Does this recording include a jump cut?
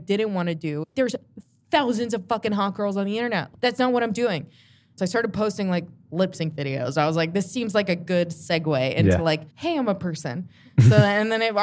yes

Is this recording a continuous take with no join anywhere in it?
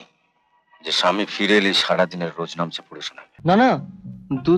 no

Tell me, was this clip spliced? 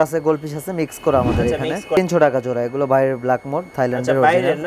yes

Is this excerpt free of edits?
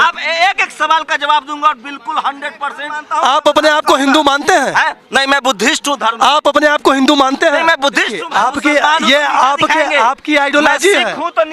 no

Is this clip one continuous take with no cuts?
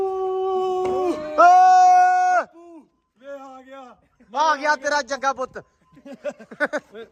yes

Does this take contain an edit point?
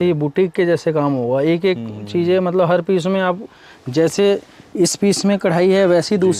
no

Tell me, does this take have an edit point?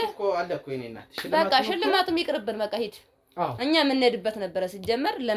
no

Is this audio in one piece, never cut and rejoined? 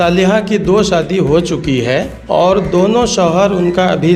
no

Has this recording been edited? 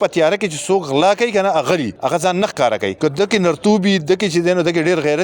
yes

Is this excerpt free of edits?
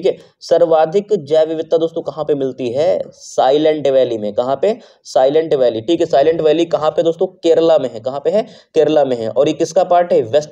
yes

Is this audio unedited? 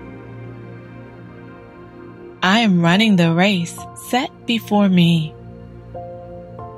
no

